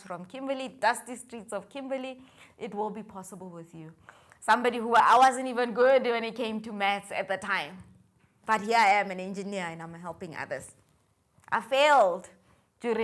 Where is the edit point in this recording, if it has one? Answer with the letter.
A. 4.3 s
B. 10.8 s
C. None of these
C